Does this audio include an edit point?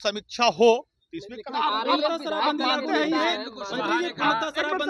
no; 0 cuts

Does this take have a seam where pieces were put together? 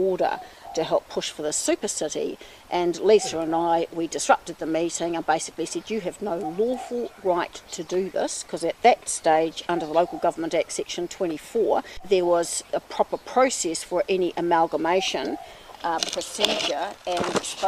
no; 0 cuts

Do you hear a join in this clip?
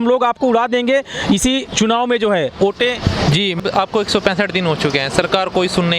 no; 0 cuts

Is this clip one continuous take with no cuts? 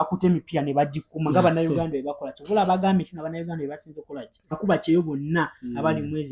no; 1 cut; at 4.6 s

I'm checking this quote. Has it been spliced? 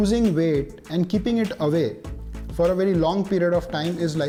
no; 0 cuts

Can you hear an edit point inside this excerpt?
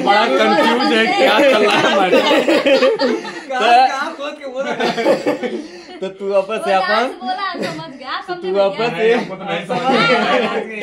no; 0 cuts

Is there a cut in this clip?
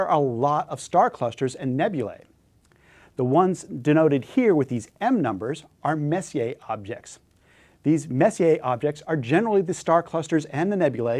yes; 1 cut; at 1.0 s

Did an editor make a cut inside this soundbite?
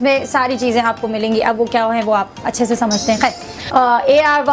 yes; 1 cut; at 3.5 s

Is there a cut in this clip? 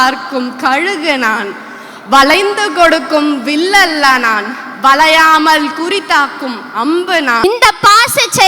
yes; 1 cut; at 7.4 s

